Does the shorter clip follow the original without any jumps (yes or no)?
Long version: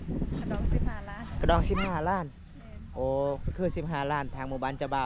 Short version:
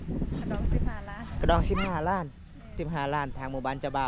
no